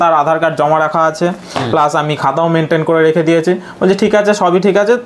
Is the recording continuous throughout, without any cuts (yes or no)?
yes